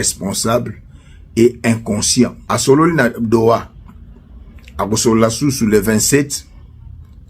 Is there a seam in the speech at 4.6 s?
no; 1 cut; at 2.5 s

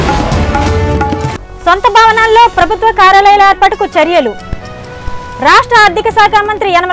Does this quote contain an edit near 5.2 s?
no; 1 cut; at 1.4 s

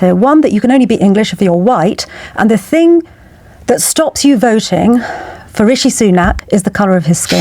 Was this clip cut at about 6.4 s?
yes; 1 cut; at 6.4 s

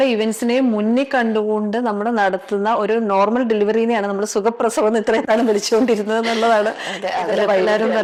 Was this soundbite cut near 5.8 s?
no; 0 cuts

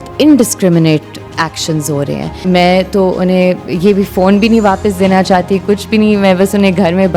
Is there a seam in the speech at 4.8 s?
no; 1 cut; at 2.4 s

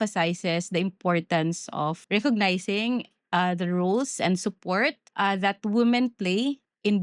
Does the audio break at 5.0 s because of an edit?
yes; 2 cuts; at 2.0 s, 5.0 s

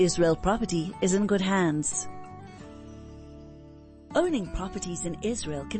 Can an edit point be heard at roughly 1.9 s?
yes; 2 cuts; at 1.9 s, 4.0 s

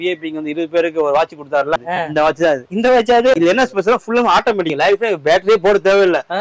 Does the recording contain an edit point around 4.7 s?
yes; 3 cuts; at 1.8 s, 3.3 s, 4.7 s

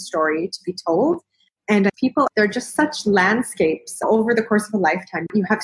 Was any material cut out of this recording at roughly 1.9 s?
yes; 1 cut; at 1.9 s

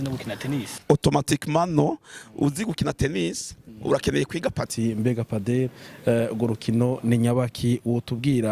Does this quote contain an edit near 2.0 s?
no; 1 cut; at 4.7 s

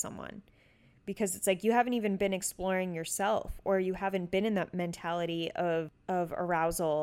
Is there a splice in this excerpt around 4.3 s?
no; 1 cut; at 6.0 s

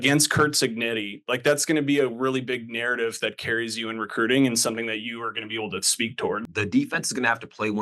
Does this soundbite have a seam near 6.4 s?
yes; 1 cut; at 6.4 s

